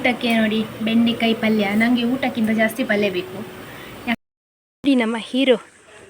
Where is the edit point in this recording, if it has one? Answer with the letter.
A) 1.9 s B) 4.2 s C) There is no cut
B